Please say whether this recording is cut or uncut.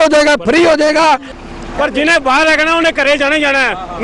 cut